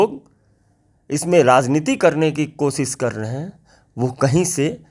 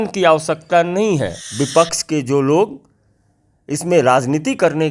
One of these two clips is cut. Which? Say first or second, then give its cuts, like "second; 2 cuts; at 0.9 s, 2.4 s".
second; 1 cut; at 1.4 s